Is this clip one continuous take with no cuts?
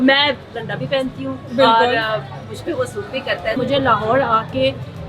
no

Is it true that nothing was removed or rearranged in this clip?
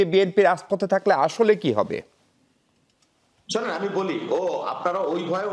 yes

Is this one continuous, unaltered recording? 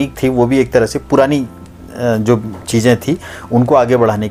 yes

